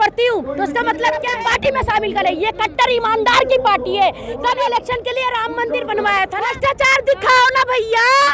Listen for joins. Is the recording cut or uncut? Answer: cut